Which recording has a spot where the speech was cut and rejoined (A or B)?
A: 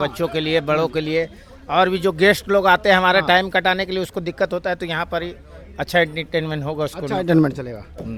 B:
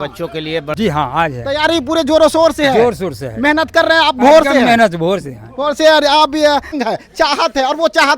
B